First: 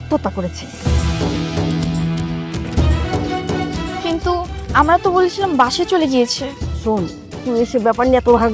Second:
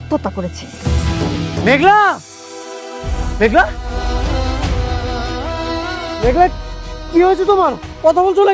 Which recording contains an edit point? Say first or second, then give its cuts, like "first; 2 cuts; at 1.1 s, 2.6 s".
second; 2 cuts; at 1.6 s, 3.2 s